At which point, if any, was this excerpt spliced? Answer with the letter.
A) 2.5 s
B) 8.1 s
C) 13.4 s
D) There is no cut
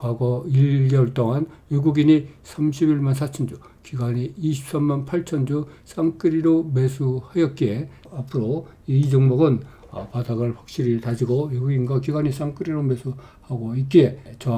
B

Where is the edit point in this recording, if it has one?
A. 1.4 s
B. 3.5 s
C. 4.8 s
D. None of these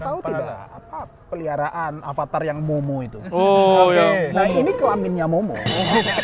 D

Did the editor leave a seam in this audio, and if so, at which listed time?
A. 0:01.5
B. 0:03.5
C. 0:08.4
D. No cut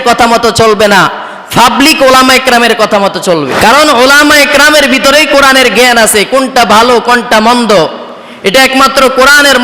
B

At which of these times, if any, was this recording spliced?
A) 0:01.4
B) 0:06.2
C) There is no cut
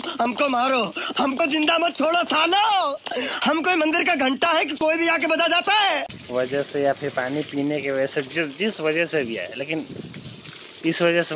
B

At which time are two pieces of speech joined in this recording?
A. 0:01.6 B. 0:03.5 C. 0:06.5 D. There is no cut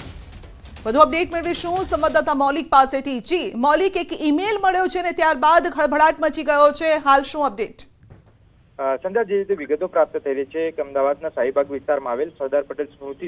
D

